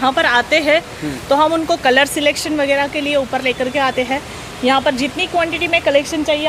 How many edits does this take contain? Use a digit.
0